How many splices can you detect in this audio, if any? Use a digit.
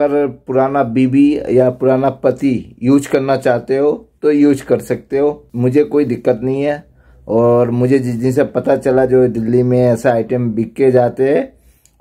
0